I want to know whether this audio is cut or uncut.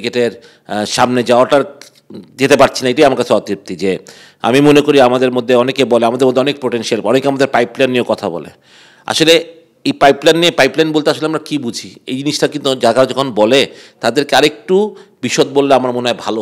uncut